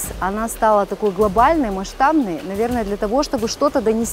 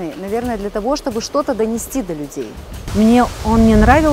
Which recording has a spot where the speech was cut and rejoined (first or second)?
second